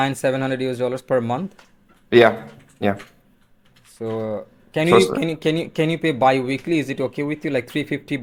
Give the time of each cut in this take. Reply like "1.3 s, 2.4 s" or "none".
none